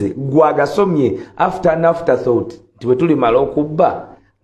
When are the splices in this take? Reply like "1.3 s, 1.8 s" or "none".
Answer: none